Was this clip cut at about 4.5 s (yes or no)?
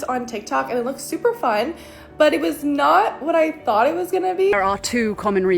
yes